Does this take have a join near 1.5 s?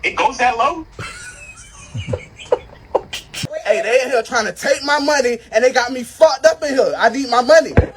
no; 1 cut; at 3.5 s

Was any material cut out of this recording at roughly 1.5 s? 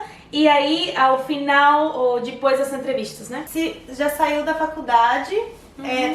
no; 1 cut; at 3.4 s

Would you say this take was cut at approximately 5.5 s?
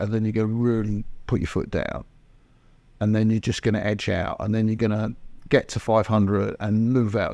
no; 0 cuts

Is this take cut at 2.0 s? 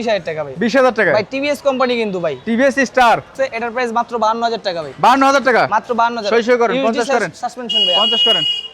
no; 1 cut; at 3.3 s

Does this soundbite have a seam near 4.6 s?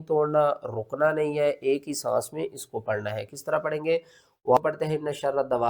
yes; 1 cut; at 4.6 s

